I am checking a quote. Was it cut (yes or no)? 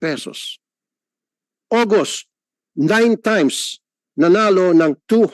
no